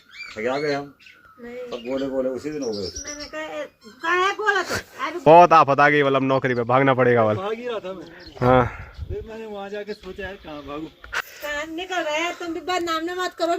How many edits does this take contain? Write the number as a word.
two